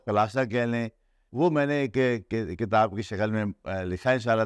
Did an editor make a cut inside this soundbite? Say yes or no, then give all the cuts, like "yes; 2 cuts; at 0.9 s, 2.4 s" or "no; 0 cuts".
yes; 1 cut; at 1.2 s